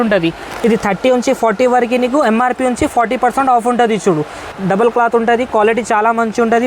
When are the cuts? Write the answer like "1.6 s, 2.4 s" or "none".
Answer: 4.5 s